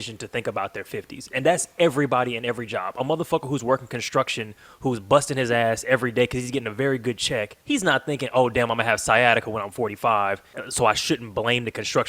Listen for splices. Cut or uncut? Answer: cut